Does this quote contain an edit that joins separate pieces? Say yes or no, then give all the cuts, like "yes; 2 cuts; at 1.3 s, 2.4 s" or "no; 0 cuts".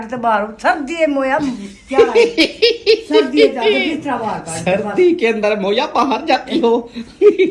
no; 0 cuts